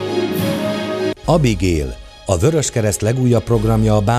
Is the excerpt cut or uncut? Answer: cut